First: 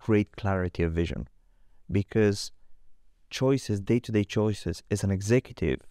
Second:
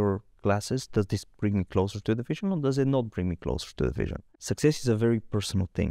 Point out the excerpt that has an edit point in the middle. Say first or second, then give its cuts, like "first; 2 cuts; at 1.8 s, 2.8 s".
second; 1 cut; at 4.2 s